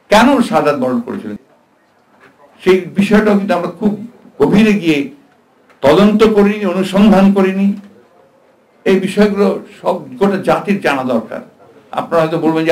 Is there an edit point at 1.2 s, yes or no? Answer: yes